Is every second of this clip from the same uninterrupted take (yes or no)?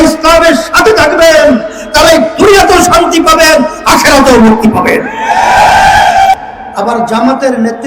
no